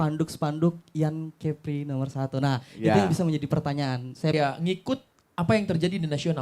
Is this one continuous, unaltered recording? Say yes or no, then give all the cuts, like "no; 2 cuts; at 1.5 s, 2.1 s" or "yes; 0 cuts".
no; 1 cut; at 4.3 s